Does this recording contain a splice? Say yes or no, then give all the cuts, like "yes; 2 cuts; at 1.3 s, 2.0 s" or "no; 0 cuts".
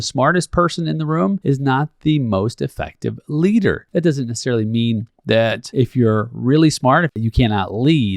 yes; 4 cuts; at 1.4 s, 3.8 s, 5.6 s, 7.2 s